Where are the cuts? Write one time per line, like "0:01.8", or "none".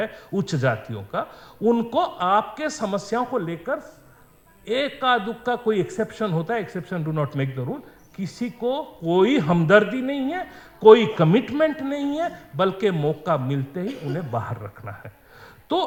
none